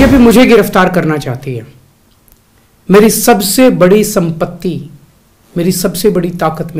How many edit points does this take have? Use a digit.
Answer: 0